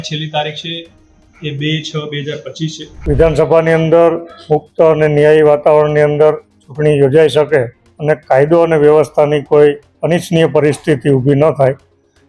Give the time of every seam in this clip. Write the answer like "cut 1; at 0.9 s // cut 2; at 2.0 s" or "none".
cut 1; at 2.9 s